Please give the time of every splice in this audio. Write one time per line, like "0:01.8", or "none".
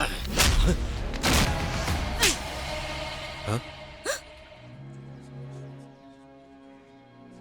0:01.5
0:04.7
0:05.8